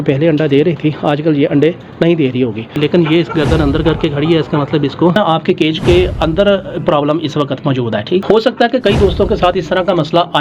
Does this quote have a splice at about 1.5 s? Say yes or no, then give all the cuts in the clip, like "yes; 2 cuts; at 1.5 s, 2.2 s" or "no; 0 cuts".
no; 3 cuts; at 2.7 s, 5.1 s, 8.2 s